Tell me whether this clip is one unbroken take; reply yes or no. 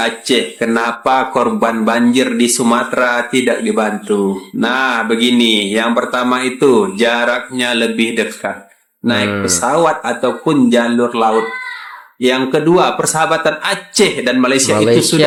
yes